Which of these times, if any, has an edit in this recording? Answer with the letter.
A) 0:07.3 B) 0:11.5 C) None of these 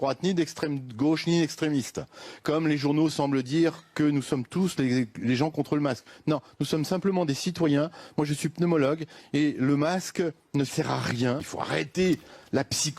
B